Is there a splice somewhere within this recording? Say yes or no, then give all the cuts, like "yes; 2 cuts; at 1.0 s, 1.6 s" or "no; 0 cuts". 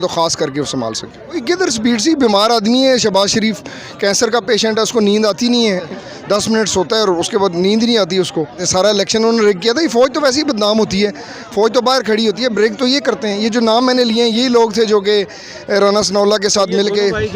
yes; 3 cuts; at 1.4 s, 5.9 s, 8.6 s